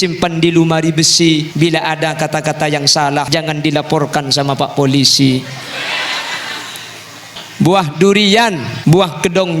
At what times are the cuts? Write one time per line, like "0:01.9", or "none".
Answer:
0:01.5
0:03.3
0:07.4
0:08.7